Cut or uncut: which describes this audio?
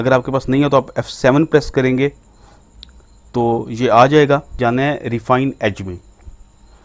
cut